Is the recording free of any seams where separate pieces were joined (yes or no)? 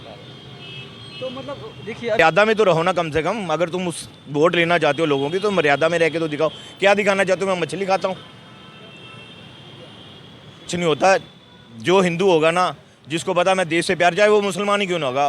no